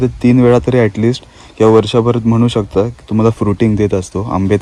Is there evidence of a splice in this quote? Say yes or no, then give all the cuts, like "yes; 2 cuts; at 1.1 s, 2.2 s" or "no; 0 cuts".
no; 0 cuts